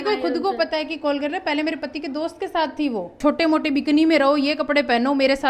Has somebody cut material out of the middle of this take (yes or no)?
yes